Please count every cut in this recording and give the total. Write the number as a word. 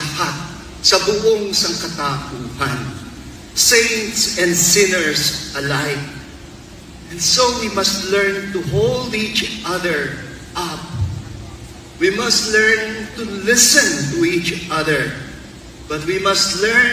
one